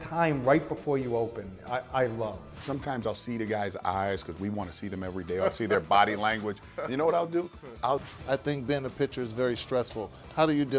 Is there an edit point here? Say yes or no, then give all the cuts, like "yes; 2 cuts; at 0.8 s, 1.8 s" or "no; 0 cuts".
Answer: yes; 2 cuts; at 2.6 s, 8.1 s